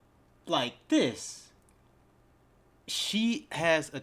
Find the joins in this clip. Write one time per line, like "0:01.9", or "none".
none